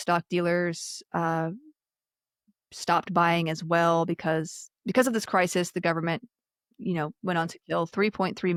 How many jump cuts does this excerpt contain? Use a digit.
0